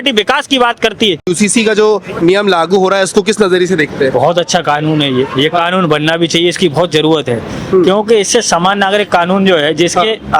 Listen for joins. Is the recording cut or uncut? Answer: cut